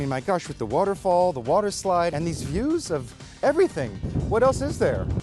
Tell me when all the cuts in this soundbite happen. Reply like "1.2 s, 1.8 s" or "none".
2.1 s, 4.0 s